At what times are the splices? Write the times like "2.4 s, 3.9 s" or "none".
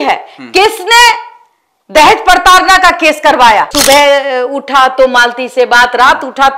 3.7 s